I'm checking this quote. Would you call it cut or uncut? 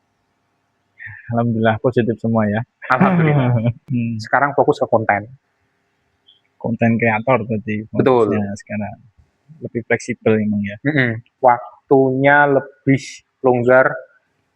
cut